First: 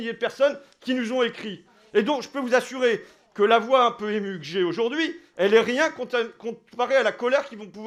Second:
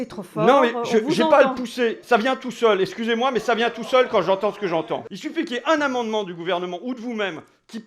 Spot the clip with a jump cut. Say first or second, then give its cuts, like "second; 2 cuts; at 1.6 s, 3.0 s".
second; 1 cut; at 5.2 s